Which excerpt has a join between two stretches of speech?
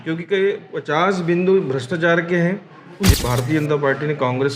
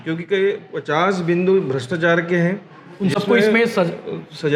first; 1 cut; at 3.2 s

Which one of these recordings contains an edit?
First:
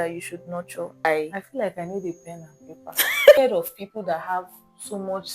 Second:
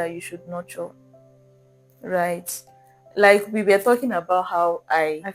first; 2 cuts; at 1.0 s, 3.4 s

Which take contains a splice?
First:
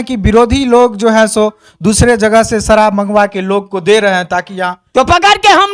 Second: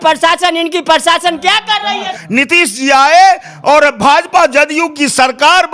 second; 1 cut; at 2.2 s

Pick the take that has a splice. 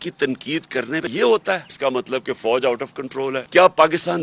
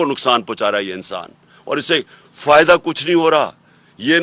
first; 3 cuts; at 1.1 s, 1.7 s, 3.4 s

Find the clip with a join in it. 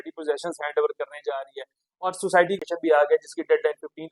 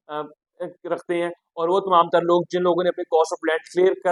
first; 1 cut; at 2.6 s

